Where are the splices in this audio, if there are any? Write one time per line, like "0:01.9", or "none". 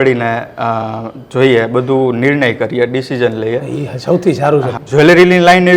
0:04.8